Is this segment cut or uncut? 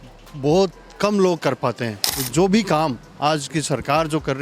cut